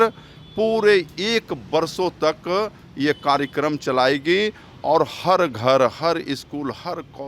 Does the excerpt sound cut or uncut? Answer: uncut